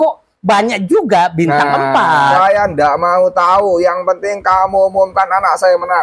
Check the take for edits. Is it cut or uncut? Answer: cut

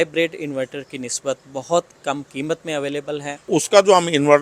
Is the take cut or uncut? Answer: cut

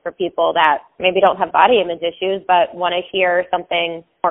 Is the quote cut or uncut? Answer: uncut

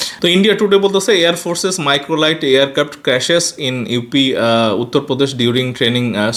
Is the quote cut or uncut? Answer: uncut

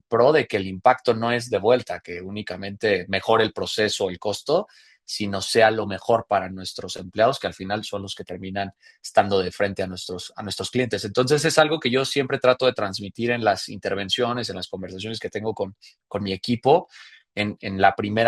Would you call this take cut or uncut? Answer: uncut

